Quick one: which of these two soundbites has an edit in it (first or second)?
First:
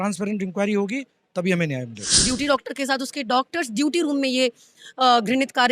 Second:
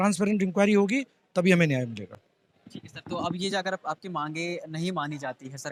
first